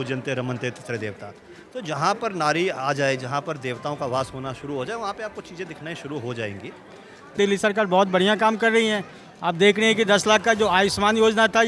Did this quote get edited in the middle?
yes; 1 cut; at 7.3 s

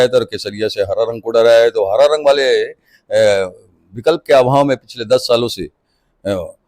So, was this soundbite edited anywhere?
no; 0 cuts

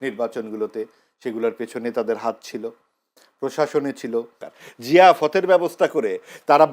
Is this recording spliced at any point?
yes; 1 cut; at 4.4 s

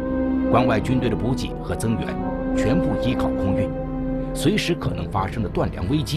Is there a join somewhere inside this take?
yes; 1 cut; at 2.8 s

